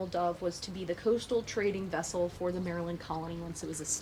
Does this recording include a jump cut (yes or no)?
no